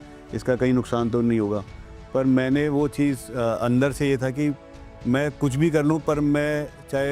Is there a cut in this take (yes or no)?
no